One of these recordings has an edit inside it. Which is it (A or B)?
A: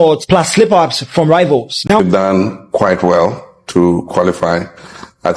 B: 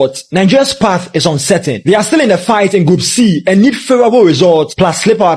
A